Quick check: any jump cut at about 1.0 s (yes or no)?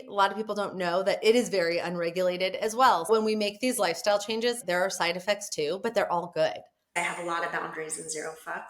no